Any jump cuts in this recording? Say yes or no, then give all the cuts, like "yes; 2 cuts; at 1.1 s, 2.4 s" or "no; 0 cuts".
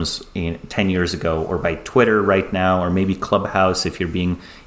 no; 0 cuts